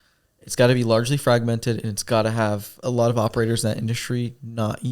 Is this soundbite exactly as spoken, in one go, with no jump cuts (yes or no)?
no